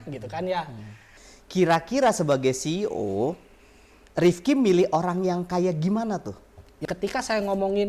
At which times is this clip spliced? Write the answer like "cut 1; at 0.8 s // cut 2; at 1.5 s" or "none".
cut 1; at 1.1 s // cut 2; at 6.8 s

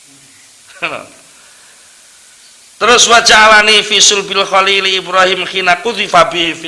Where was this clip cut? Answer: none

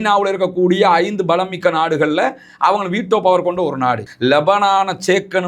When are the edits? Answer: cut 1; at 4.1 s

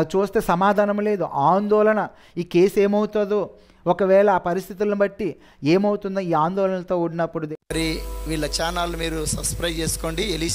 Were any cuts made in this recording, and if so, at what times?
cut 1; at 7.5 s

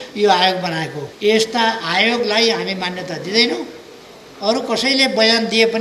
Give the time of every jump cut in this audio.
cut 1; at 1.0 s

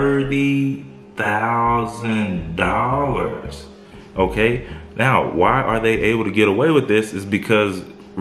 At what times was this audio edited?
none

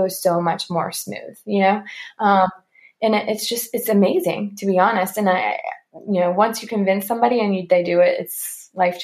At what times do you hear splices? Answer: none

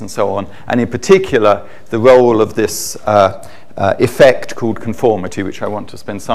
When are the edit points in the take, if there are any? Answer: cut 1; at 5.4 s

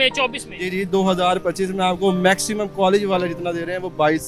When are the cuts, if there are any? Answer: none

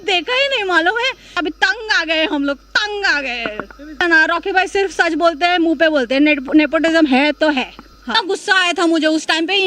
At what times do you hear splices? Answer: cut 1; at 1.4 s // cut 2; at 4.0 s // cut 3; at 8.1 s

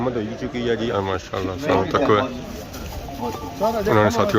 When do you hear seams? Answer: cut 1; at 0.9 s

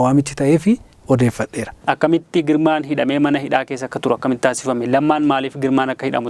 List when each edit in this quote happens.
cut 1; at 1.7 s

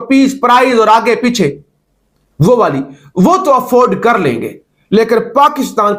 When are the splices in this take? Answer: none

